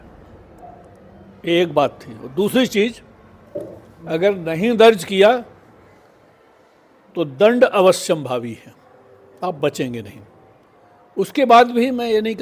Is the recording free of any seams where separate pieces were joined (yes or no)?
yes